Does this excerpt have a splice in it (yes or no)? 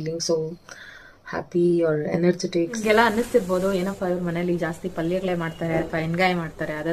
yes